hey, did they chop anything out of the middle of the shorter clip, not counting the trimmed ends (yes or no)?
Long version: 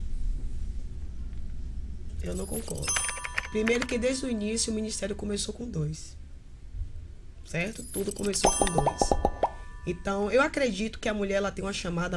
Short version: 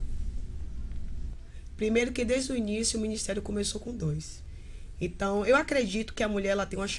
yes